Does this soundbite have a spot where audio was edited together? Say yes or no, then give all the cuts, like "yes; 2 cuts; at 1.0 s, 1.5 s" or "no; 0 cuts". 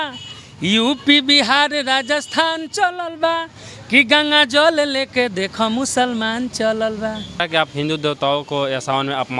yes; 1 cut; at 7.4 s